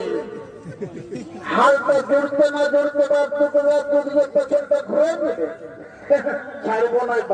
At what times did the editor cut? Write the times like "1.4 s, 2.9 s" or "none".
none